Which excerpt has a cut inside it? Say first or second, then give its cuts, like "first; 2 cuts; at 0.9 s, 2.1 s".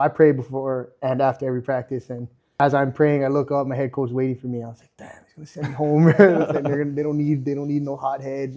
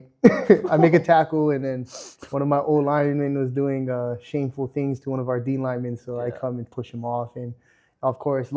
first; 1 cut; at 2.6 s